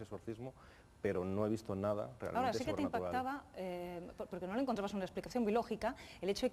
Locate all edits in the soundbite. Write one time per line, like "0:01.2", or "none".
0:03.3